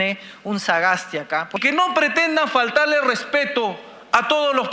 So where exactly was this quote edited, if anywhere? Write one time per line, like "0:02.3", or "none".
0:01.6